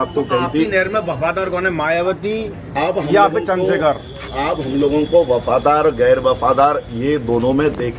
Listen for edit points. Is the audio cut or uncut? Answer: uncut